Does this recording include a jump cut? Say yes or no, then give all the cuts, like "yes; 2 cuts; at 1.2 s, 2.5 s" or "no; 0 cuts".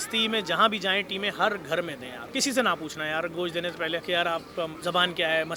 no; 0 cuts